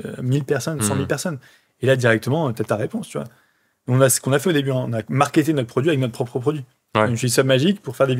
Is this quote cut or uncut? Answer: uncut